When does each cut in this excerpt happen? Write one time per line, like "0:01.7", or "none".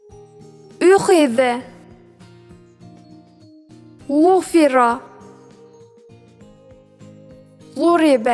0:00.8
0:02.4
0:04.1